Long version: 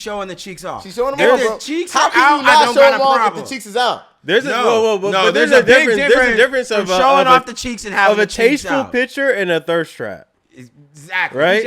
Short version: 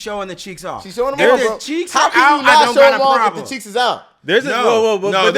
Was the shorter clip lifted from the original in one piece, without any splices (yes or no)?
yes